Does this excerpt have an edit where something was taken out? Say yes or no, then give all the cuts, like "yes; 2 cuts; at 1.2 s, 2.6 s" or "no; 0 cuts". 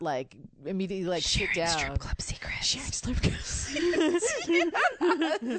no; 0 cuts